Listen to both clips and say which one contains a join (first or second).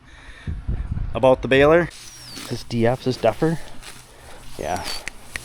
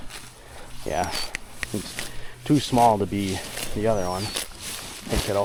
first